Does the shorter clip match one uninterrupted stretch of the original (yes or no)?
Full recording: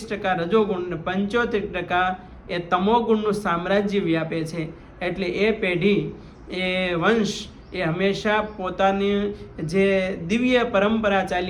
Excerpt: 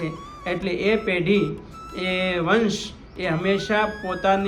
yes